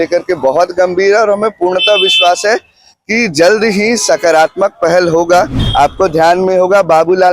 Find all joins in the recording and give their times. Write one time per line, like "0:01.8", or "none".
0:05.6